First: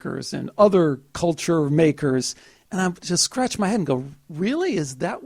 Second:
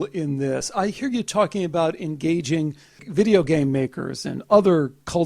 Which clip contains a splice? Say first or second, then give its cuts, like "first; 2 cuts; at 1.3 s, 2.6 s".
second; 1 cut; at 3.0 s